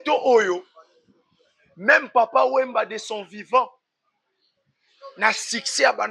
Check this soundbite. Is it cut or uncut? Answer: uncut